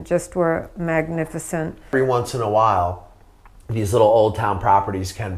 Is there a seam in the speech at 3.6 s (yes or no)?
no